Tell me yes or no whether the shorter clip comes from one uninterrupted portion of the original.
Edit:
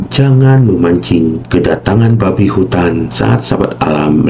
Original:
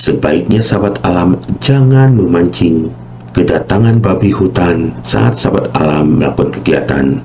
no